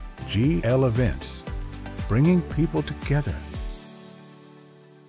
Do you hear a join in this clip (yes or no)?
no